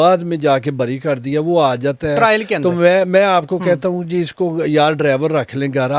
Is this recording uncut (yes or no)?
yes